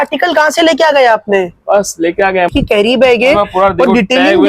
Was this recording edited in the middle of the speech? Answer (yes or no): yes